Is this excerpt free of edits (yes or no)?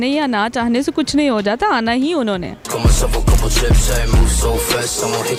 yes